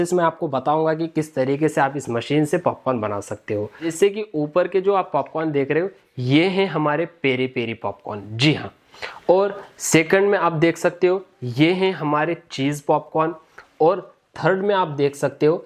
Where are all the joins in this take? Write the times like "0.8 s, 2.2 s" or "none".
3.9 s